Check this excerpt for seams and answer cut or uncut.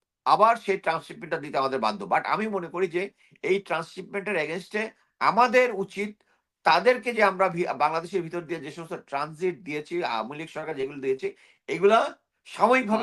uncut